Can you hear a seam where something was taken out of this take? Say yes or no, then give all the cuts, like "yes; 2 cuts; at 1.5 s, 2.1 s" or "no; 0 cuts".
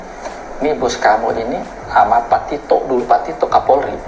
no; 0 cuts